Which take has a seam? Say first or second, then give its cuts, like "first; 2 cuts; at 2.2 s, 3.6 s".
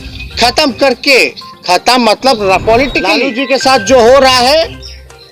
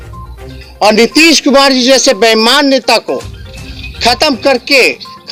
first; 1 cut; at 3.2 s